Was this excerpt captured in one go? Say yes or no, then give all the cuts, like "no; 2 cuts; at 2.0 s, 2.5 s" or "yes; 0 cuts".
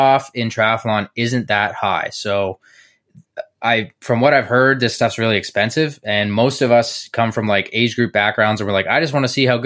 yes; 0 cuts